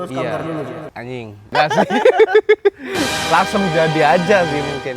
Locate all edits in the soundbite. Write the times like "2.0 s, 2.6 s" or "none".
1.5 s